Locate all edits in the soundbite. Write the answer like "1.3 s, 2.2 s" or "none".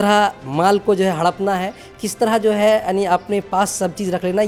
none